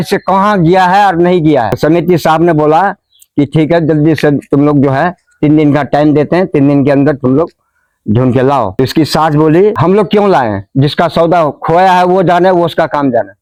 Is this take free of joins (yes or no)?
yes